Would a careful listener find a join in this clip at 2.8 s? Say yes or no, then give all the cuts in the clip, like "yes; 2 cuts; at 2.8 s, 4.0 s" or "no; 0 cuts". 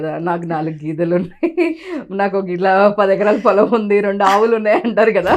no; 0 cuts